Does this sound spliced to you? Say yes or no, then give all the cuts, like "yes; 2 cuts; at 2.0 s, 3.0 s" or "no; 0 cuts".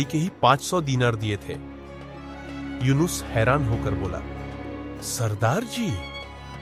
no; 0 cuts